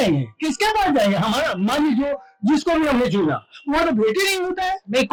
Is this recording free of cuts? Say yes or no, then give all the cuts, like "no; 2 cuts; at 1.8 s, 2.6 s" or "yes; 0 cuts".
yes; 0 cuts